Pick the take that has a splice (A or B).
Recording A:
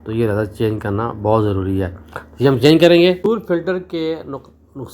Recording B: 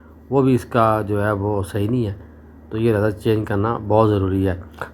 A